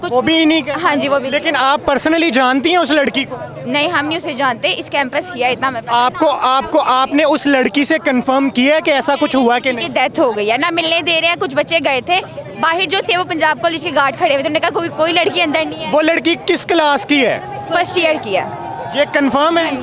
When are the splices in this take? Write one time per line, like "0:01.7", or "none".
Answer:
none

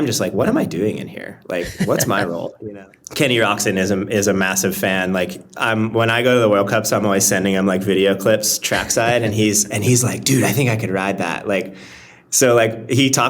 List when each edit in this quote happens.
0:02.5

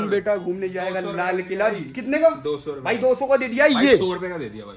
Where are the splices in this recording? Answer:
none

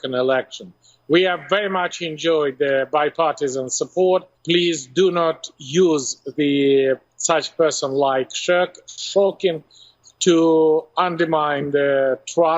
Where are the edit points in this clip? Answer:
0:04.3

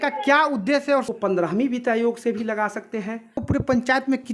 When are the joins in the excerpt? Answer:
0:01.1
0:03.4

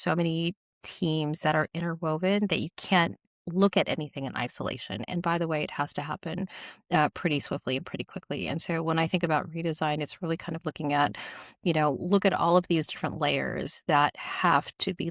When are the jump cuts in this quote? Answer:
none

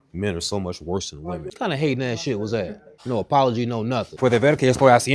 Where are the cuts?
0:01.5
0:02.9
0:04.1

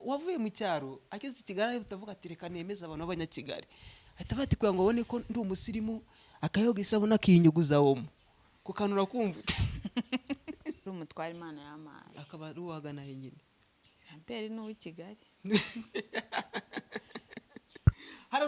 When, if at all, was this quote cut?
0:10.8

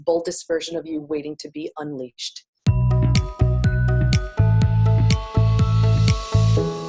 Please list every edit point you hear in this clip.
0:02.4

